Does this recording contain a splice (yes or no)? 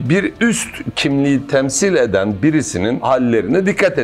yes